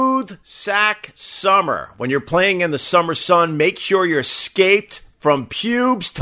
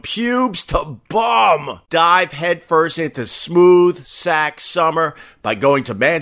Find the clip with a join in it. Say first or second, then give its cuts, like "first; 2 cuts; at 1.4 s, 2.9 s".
second; 1 cut; at 1.8 s